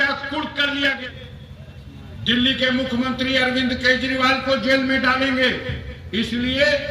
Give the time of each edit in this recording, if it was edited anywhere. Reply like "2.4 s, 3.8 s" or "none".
1.0 s